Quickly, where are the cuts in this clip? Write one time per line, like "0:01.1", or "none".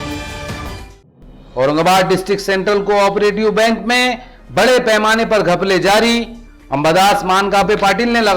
0:00.9